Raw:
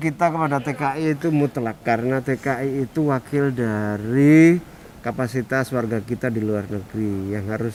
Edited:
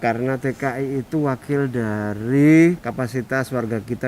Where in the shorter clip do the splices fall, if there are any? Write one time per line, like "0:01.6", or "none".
0:02.9

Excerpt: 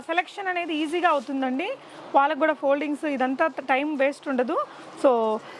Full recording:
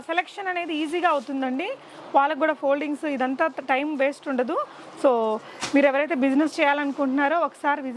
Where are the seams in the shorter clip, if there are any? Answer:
none

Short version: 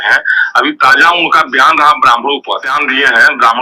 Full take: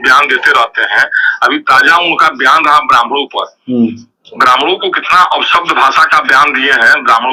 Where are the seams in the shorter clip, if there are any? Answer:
0:02.7

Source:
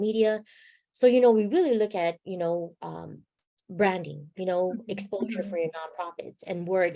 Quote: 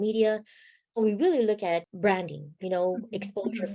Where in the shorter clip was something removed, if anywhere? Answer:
0:01.0
0:01.9

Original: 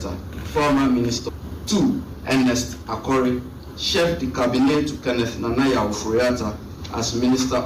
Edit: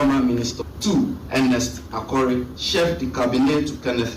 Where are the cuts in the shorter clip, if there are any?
0:01.0
0:02.6

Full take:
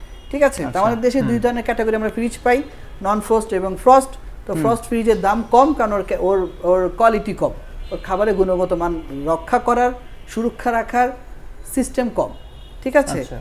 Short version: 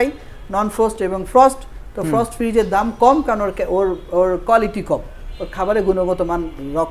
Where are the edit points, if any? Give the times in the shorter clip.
none

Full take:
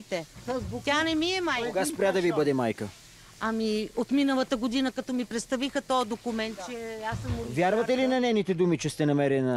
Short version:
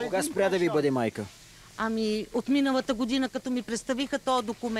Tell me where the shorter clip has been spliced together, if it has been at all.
none

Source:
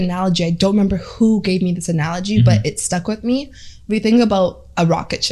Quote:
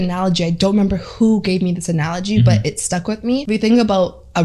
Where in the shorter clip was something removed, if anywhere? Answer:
0:03.4

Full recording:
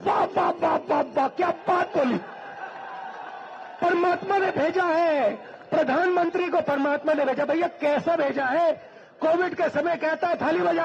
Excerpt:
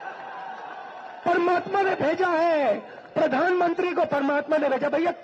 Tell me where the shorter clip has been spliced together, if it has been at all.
none

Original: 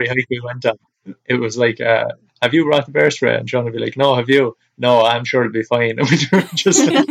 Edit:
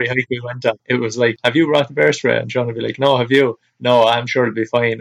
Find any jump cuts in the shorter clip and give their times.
0:01.2

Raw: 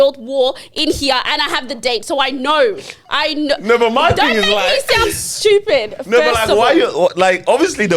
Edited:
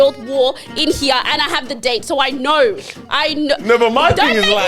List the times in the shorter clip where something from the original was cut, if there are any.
none

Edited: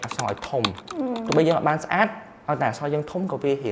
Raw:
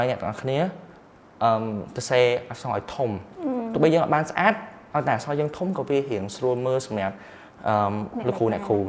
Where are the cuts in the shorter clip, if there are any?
none

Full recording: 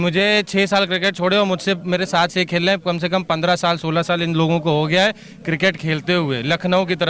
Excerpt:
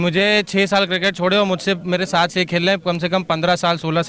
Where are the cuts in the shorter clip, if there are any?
none

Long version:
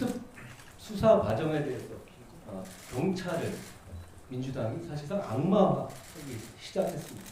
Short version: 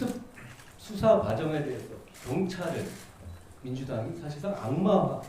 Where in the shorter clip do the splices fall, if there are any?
0:02.1

